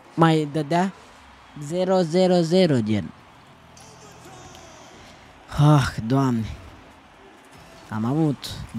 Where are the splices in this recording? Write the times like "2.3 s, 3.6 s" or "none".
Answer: none